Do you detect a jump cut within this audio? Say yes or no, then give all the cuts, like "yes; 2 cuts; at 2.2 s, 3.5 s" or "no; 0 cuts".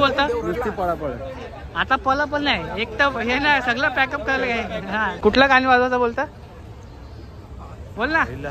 yes; 1 cut; at 5.2 s